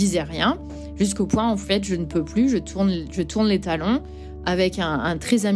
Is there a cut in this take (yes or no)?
no